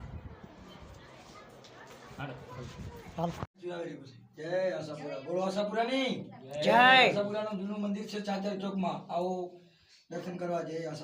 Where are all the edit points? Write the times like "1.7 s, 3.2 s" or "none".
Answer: 3.6 s